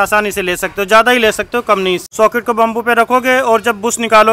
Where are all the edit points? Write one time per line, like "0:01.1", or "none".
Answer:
0:02.1